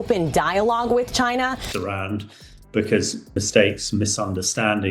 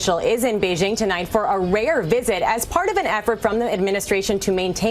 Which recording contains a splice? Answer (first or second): first